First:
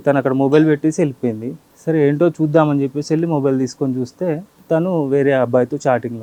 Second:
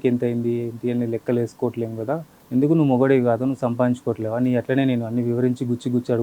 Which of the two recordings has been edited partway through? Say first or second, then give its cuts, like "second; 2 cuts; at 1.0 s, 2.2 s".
second; 1 cut; at 2.3 s